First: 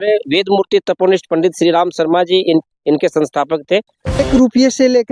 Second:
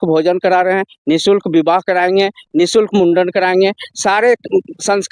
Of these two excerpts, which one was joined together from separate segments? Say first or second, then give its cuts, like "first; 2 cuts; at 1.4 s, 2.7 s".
first; 1 cut; at 4.2 s